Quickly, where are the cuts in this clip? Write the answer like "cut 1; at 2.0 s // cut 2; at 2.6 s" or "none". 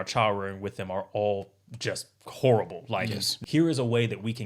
cut 1; at 3.3 s